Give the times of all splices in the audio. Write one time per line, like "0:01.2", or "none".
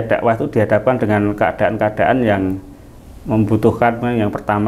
none